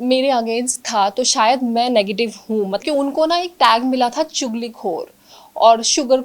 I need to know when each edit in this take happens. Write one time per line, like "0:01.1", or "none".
0:02.8